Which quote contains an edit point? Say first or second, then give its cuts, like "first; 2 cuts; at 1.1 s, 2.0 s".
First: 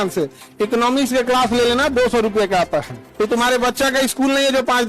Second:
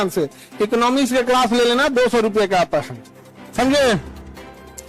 first; 1 cut; at 3.0 s